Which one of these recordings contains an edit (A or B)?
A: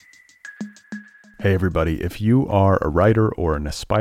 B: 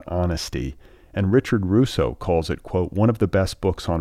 A